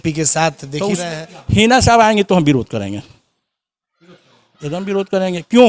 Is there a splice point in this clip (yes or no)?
yes